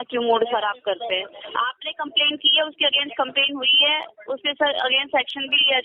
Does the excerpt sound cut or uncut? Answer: uncut